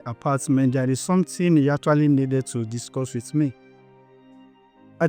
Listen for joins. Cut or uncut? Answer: uncut